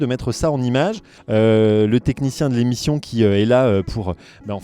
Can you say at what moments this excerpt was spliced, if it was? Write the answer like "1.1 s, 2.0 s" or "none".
1.1 s